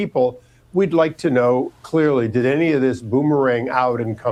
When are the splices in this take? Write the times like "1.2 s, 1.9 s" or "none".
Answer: none

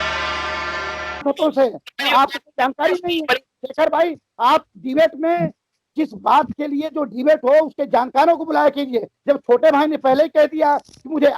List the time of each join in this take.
1.2 s

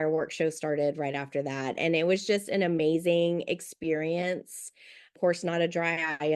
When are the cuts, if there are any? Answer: none

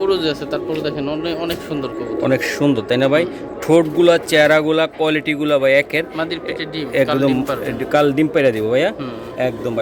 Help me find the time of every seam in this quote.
none

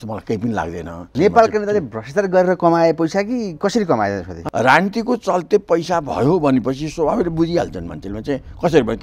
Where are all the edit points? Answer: 1.1 s, 4.4 s

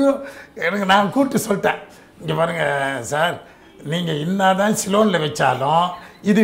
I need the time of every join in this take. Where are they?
none

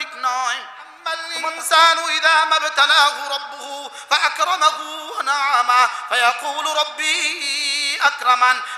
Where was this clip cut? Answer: 1.3 s

